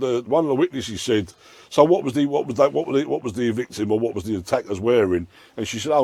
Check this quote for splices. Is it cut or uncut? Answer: uncut